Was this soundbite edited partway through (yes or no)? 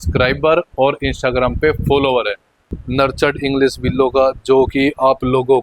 yes